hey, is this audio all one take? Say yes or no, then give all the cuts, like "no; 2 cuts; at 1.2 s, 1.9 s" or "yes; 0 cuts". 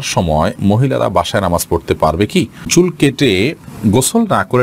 no; 1 cut; at 2.7 s